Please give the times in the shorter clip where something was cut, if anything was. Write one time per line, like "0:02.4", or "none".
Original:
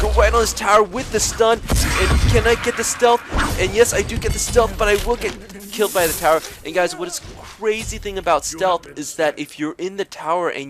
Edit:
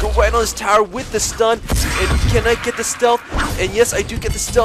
none